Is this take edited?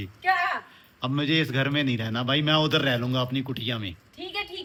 no; 0 cuts

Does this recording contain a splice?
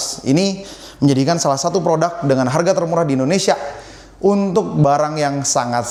no; 0 cuts

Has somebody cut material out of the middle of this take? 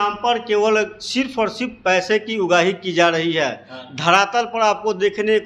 no; 0 cuts

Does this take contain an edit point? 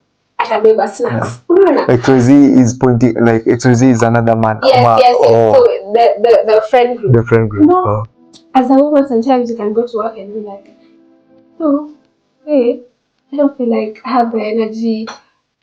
yes; 1 cut; at 8.1 s

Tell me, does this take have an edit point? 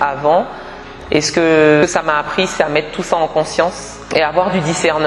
yes; 2 cuts; at 1.8 s, 4.0 s

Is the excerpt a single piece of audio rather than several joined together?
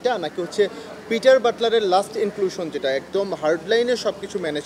yes; 0 cuts

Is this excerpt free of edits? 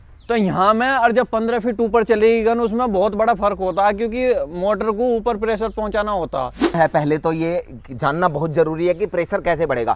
yes; 0 cuts

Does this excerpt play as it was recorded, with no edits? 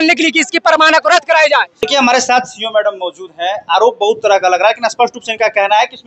no; 1 cut; at 1.7 s

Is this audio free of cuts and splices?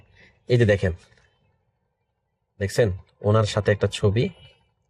yes; 0 cuts

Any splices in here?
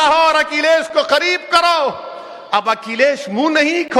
no; 0 cuts

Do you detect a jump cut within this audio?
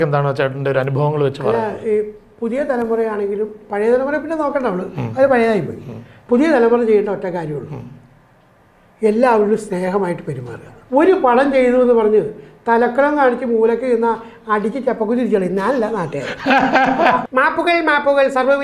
yes; 1 cut; at 17.2 s

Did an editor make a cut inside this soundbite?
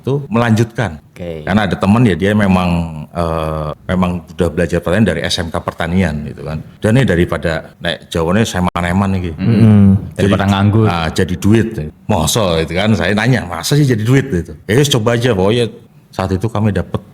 yes; 1 cut; at 15.8 s

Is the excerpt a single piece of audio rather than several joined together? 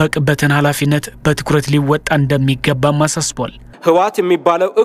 yes; 0 cuts

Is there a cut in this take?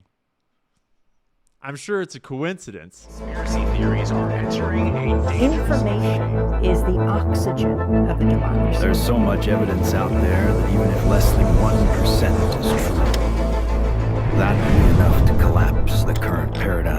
yes; 1 cut; at 3.3 s

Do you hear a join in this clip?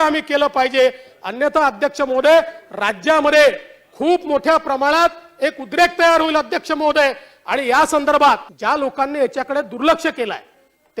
yes; 1 cut; at 8.5 s

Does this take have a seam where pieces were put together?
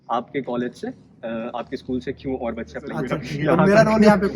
yes; 1 cut; at 3.2 s

